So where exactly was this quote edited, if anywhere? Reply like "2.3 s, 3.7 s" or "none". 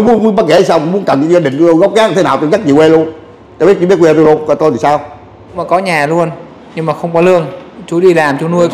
5.6 s